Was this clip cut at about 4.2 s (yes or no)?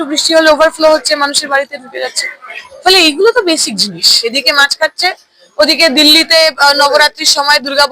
yes